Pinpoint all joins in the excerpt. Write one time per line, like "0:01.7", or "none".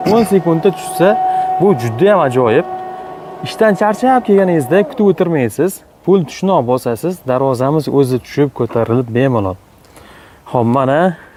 none